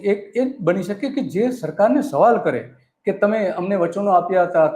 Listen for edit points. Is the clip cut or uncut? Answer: uncut